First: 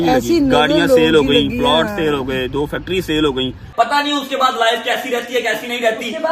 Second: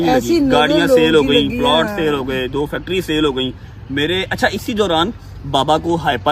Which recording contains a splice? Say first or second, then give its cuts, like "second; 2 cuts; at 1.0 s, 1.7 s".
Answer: first; 1 cut; at 3.7 s